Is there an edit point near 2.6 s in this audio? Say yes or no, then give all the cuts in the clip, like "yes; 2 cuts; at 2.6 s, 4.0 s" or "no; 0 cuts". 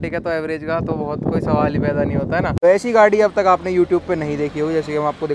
yes; 1 cut; at 2.6 s